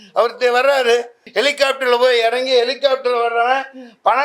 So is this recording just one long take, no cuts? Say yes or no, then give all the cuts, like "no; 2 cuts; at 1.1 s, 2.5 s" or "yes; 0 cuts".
no; 1 cut; at 1.2 s